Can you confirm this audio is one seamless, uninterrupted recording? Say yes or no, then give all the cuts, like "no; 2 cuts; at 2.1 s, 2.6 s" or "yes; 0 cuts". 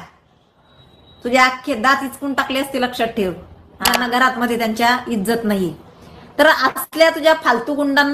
no; 1 cut; at 3.9 s